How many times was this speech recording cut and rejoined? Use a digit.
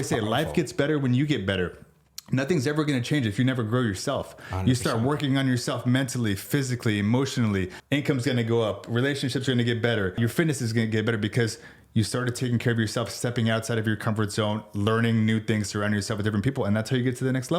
2